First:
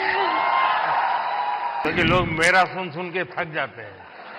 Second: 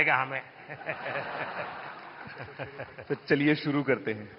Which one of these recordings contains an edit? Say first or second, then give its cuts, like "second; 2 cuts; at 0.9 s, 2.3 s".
first; 1 cut; at 1.9 s